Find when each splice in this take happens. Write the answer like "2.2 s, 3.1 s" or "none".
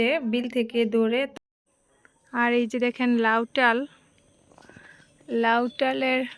1.3 s